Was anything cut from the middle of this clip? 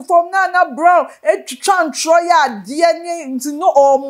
no; 0 cuts

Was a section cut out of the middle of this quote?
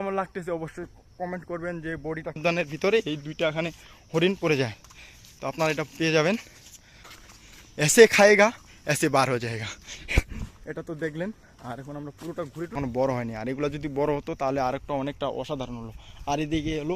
yes; 3 cuts; at 2.4 s, 7.1 s, 12.7 s

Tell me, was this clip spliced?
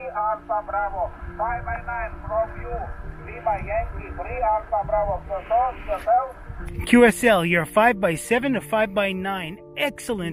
no; 0 cuts

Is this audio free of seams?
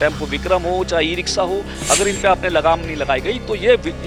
yes; 0 cuts

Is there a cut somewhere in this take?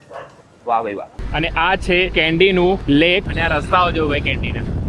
yes; 3 cuts; at 1.1 s, 2.1 s, 3.0 s

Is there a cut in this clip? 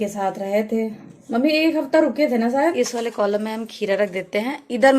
yes; 1 cut; at 2.7 s

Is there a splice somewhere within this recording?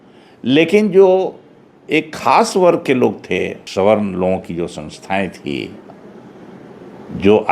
yes; 1 cut; at 3.6 s

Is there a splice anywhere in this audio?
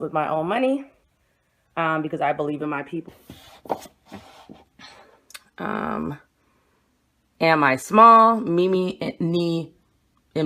no; 0 cuts

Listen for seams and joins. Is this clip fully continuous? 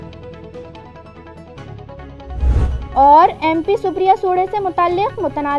yes; 0 cuts

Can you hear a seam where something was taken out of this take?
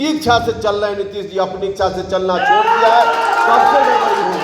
no; 0 cuts

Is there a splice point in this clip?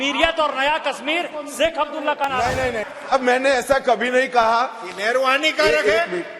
yes; 1 cut; at 2.9 s

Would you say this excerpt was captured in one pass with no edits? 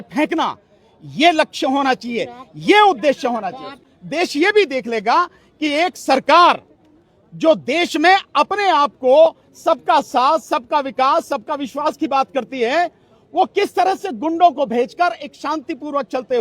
no; 1 cut; at 3.9 s

